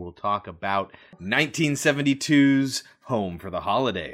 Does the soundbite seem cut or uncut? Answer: cut